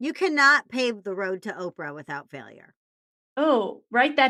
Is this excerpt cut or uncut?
uncut